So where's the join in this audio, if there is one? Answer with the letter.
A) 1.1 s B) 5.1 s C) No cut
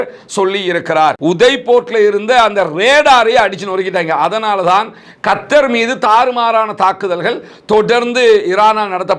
A